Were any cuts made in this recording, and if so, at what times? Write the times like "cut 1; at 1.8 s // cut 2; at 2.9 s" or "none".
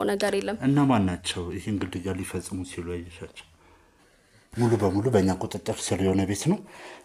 cut 1; at 3.9 s

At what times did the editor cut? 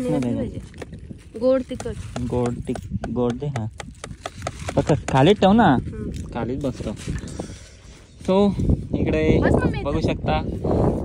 none

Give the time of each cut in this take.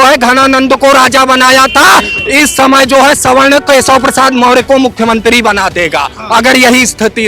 none

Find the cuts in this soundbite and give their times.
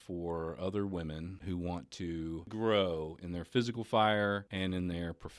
cut 1; at 1.3 s // cut 2; at 2.5 s // cut 3; at 4.5 s

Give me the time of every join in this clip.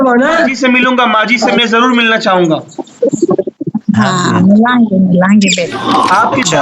cut 1; at 5.6 s

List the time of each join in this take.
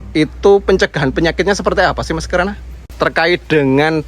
cut 1; at 2.8 s

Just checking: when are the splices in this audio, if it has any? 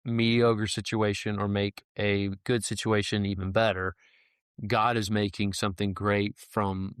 none

